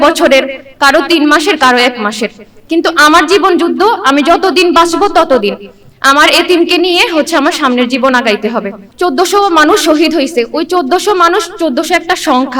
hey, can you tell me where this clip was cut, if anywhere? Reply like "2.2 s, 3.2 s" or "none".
8.8 s